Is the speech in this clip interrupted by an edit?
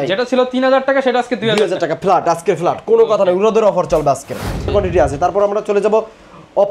yes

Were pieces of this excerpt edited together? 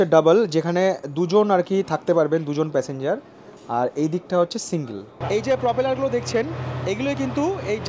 yes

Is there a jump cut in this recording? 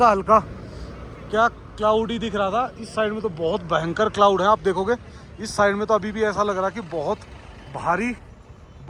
no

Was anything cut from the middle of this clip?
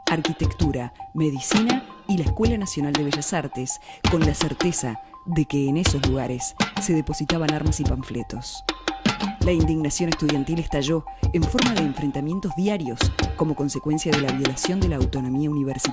yes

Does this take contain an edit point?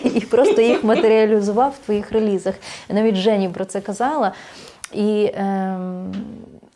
no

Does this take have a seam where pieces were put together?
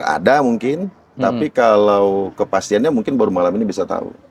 no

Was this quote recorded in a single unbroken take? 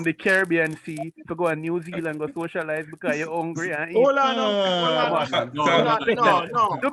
yes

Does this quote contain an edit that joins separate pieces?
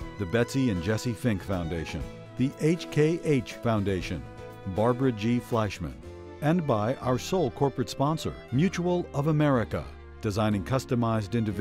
no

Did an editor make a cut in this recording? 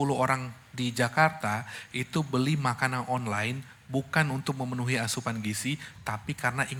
no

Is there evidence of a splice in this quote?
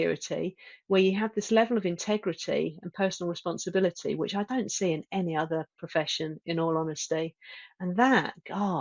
no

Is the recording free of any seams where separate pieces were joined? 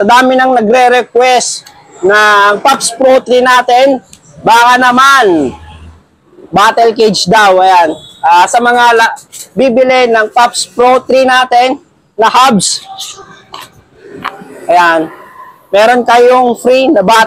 yes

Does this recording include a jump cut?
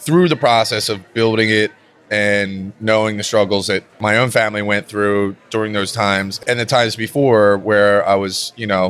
yes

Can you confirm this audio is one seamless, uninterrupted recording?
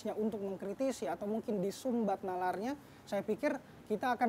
yes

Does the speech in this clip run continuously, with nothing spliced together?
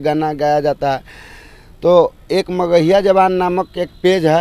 yes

